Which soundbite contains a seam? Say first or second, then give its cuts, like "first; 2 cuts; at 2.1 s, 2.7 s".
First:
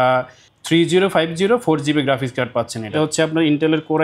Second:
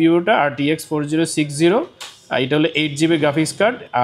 first; 1 cut; at 2.9 s